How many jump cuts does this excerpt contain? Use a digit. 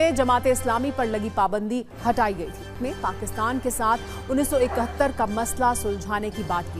1